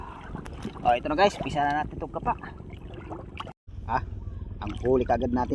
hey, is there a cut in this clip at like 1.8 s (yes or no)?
no